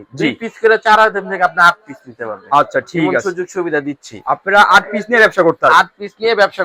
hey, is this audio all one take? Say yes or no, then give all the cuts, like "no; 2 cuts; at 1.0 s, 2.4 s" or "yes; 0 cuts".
yes; 0 cuts